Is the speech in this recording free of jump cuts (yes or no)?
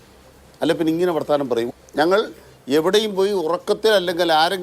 no